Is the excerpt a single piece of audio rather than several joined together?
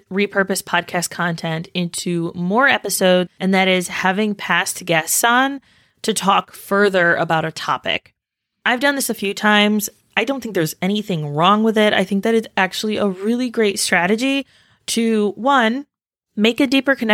no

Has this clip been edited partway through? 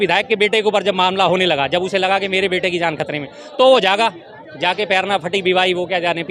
no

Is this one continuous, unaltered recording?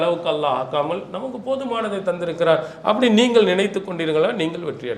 yes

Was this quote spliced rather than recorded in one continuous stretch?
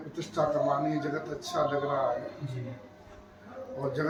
no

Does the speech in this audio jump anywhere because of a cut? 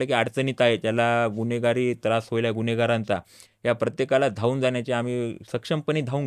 no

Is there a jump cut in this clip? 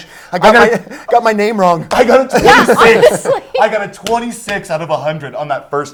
no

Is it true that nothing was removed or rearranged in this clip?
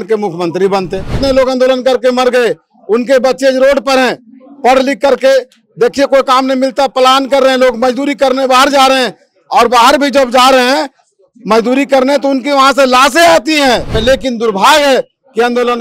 no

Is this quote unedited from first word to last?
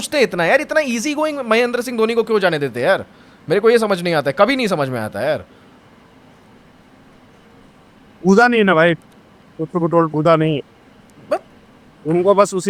yes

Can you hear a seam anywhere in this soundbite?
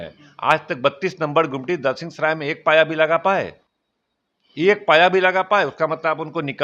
no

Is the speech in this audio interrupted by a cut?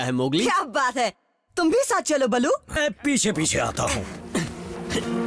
yes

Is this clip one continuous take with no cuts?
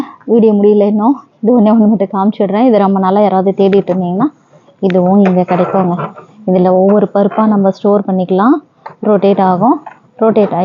yes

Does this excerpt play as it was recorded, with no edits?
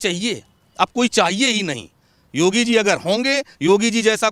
yes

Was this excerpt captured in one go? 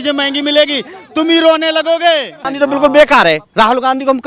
no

